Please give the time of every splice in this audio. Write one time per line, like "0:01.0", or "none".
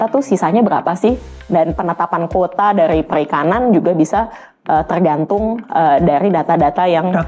none